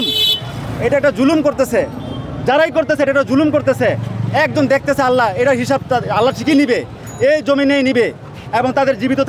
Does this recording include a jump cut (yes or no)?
no